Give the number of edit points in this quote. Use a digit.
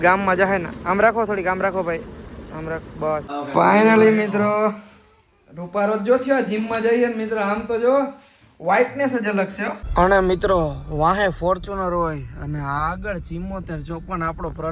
2